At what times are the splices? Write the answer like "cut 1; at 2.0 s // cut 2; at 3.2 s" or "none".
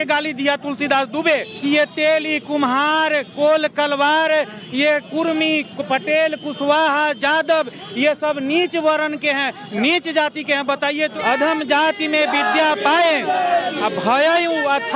cut 1; at 1.5 s // cut 2; at 11.2 s